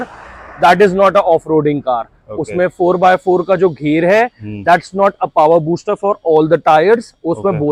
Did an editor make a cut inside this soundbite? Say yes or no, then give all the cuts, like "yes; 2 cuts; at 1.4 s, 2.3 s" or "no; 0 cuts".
no; 0 cuts